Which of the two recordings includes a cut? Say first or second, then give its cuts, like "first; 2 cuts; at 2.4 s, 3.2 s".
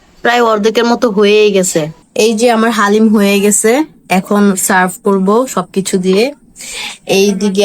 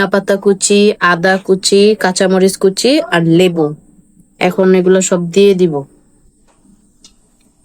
first; 1 cut; at 2.0 s